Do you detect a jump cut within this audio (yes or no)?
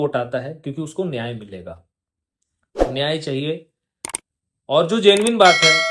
no